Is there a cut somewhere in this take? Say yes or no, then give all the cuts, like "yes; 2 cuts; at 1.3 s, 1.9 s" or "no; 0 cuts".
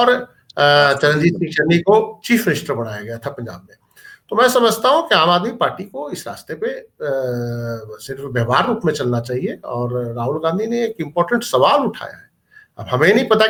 no; 0 cuts